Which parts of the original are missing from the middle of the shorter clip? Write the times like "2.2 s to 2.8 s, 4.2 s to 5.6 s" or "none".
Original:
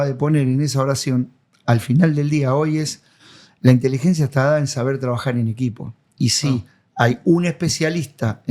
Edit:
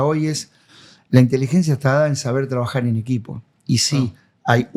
none